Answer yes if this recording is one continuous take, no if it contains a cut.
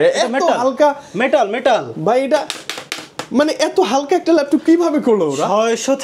yes